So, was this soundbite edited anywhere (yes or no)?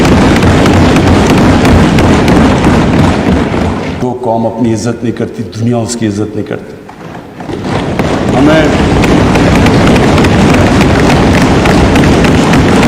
yes